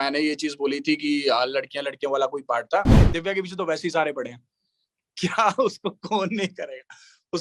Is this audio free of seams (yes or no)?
no